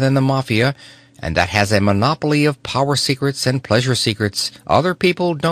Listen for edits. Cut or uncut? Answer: cut